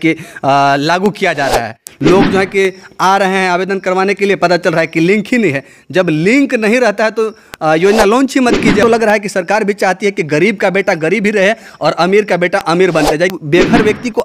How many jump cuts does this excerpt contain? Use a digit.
3